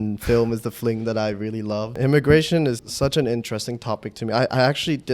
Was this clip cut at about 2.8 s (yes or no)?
yes